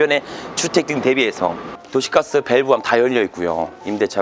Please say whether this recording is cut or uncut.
cut